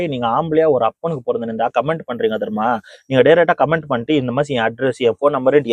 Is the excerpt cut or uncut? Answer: uncut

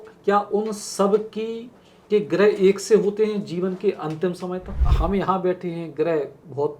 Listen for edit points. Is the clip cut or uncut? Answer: cut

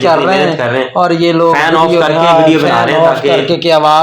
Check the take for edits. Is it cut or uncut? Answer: uncut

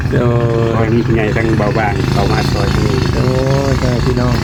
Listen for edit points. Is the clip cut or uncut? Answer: uncut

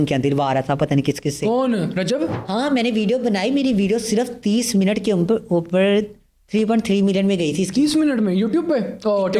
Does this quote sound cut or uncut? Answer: uncut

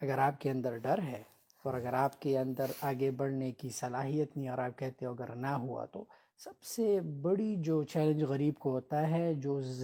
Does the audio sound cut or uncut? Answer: uncut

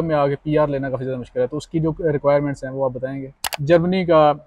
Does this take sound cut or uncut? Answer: cut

